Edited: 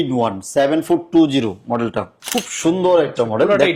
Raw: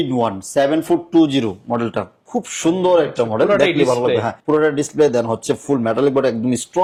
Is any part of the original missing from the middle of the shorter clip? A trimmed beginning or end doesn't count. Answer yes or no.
no